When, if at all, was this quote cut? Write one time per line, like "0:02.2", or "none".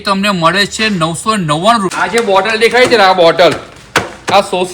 0:01.9